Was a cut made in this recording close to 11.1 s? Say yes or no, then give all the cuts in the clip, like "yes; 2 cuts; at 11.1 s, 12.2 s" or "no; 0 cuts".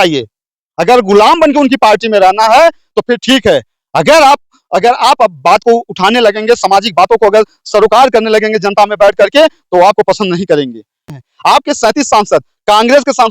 yes; 1 cut; at 11.1 s